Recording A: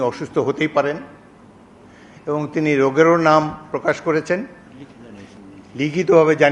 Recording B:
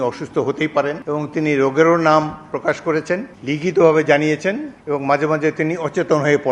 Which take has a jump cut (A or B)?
B